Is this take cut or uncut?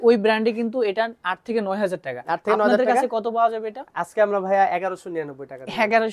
uncut